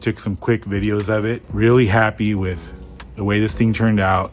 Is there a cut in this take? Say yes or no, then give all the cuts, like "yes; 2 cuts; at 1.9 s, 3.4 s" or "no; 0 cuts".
yes; 1 cut; at 1.4 s